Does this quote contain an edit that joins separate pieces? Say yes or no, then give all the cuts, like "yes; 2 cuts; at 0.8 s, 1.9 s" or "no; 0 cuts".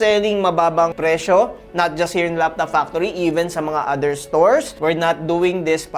yes; 1 cut; at 4.7 s